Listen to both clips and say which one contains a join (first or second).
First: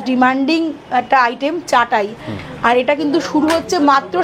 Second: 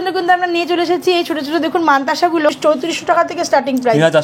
second